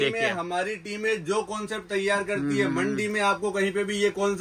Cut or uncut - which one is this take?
uncut